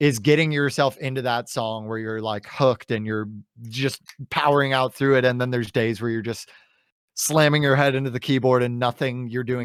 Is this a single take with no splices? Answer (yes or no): yes